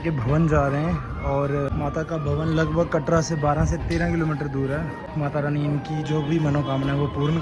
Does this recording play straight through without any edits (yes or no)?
no